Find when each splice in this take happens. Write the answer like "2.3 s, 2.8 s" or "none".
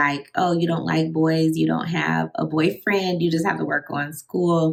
none